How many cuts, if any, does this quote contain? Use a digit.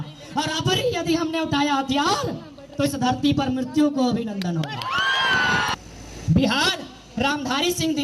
1